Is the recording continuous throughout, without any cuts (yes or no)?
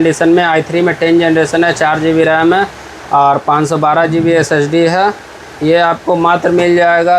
yes